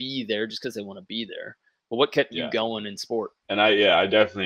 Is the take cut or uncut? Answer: uncut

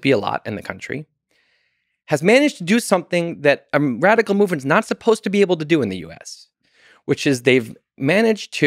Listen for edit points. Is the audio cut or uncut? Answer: uncut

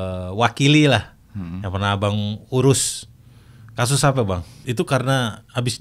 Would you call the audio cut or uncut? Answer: cut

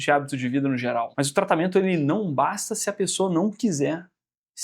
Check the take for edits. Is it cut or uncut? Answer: cut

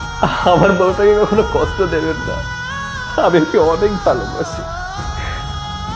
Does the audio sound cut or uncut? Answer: uncut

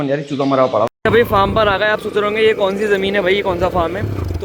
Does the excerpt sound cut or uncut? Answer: cut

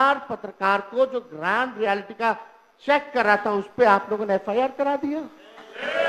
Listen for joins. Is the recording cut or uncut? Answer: uncut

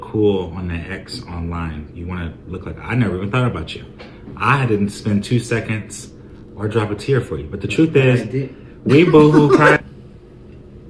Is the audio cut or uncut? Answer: cut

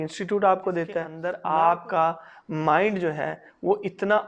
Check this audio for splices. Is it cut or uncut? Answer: cut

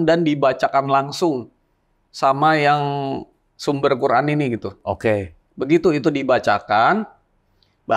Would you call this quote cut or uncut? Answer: cut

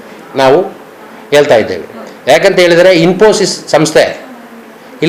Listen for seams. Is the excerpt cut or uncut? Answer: uncut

